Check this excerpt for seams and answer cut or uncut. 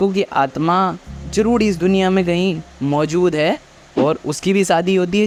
uncut